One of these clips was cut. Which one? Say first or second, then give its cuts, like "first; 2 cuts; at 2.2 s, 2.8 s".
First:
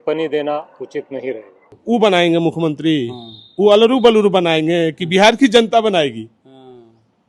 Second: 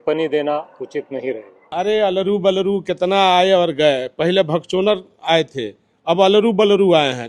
second; 1 cut; at 1.5 s